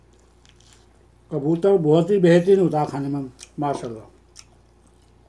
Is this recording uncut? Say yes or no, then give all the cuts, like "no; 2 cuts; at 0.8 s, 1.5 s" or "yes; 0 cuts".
yes; 0 cuts